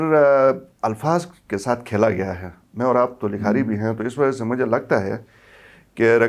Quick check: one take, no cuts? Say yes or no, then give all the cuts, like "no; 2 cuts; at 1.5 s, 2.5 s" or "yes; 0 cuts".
yes; 0 cuts